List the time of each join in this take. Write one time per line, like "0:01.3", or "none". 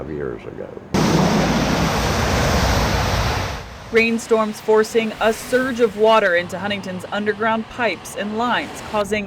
0:01.1